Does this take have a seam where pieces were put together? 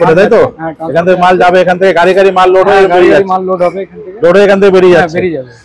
no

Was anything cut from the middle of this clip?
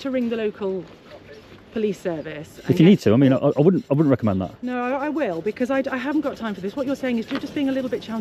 no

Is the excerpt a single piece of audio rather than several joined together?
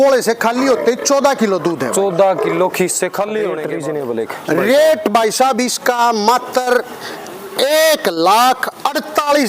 no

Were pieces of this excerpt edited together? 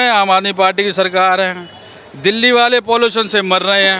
no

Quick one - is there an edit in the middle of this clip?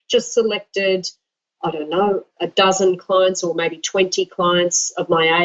no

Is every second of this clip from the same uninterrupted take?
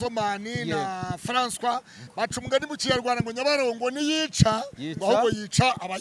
no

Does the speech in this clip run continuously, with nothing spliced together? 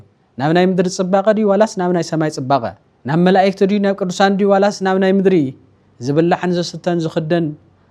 yes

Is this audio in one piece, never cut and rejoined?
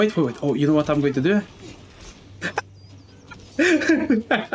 yes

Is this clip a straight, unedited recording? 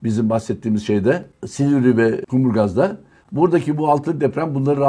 no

